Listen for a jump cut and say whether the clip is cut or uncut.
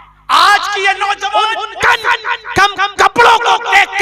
cut